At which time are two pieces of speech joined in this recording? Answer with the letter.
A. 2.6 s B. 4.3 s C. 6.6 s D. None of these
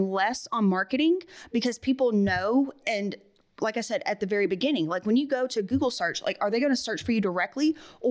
D